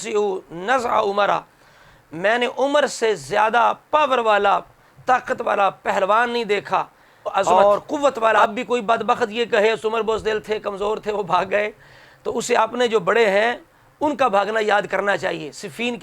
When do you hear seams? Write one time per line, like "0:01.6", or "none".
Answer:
0:08.4